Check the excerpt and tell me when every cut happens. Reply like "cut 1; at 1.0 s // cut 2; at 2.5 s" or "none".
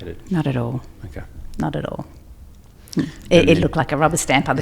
none